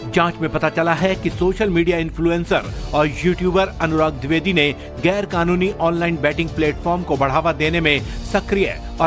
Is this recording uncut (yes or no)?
yes